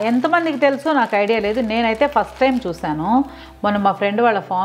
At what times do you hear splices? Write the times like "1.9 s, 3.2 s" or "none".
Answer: none

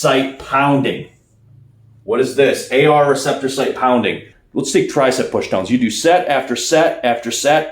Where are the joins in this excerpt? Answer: 4.3 s

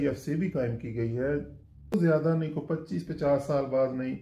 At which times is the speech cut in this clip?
1.9 s

